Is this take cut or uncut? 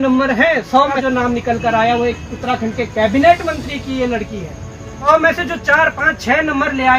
cut